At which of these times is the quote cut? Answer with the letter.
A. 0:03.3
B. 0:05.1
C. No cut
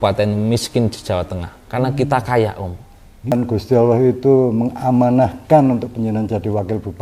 A